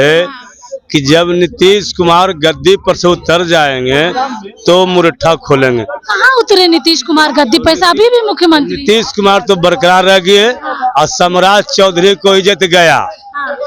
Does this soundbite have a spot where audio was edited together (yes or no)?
no